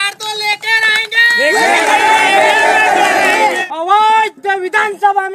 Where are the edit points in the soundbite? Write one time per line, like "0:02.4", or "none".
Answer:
0:03.6